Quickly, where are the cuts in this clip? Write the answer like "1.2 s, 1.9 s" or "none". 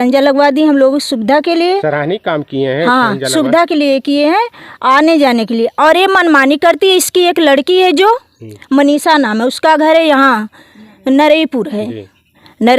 none

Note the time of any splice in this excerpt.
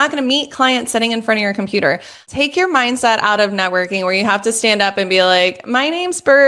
2.2 s

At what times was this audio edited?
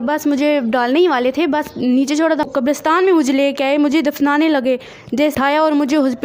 2.4 s, 5.3 s

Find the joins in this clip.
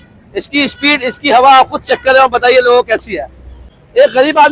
3.6 s

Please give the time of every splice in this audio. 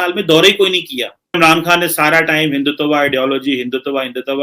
1.4 s

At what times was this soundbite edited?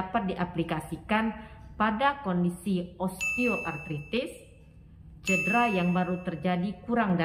none

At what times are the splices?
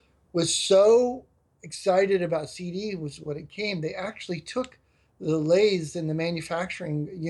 none

